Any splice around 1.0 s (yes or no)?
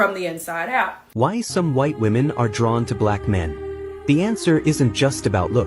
yes